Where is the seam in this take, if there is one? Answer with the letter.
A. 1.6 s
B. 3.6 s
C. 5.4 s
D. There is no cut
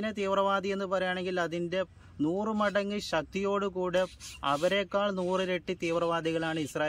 D